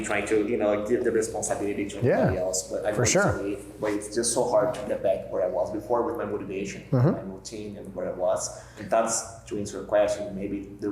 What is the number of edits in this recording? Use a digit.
1